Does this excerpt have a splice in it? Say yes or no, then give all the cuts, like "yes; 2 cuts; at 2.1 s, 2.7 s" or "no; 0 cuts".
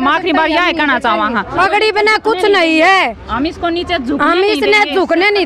yes; 1 cut; at 1.5 s